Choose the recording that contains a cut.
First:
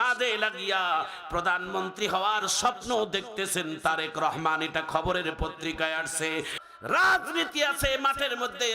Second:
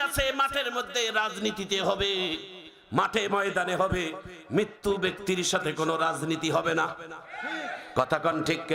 first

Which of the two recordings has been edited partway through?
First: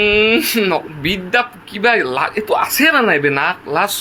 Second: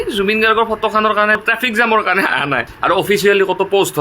second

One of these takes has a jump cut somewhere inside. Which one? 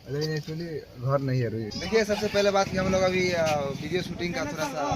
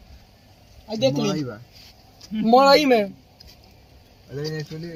first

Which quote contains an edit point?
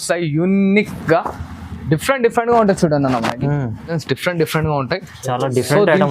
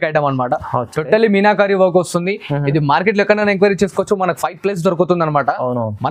first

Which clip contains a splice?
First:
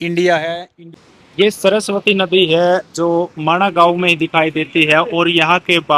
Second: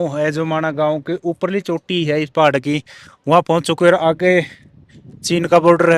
first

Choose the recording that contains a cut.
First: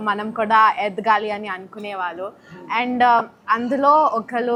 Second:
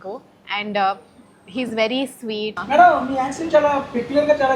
second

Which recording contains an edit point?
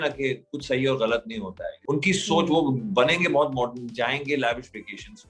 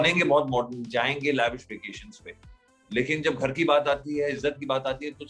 first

